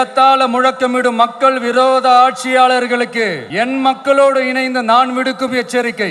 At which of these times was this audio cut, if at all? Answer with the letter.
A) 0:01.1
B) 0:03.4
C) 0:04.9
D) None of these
B